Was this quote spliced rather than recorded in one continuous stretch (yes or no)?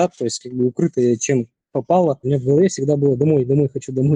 yes